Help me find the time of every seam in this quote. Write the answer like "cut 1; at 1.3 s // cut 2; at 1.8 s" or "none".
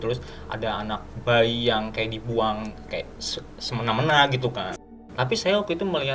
cut 1; at 4.8 s